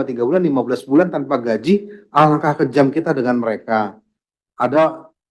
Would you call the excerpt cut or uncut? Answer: cut